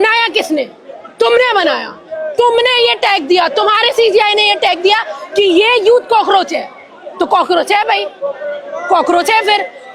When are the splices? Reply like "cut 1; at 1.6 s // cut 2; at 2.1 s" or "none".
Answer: none